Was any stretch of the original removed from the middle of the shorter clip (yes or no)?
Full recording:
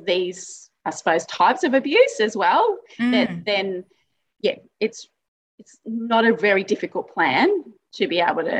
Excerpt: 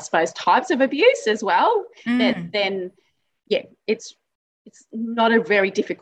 no